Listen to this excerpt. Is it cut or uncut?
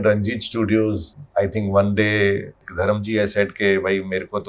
cut